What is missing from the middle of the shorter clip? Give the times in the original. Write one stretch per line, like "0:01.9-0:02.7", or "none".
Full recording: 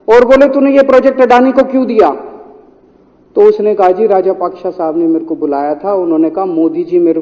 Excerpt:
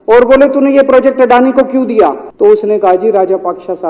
0:02.2-0:03.2